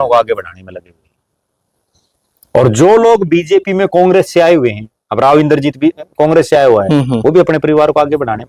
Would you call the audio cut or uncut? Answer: uncut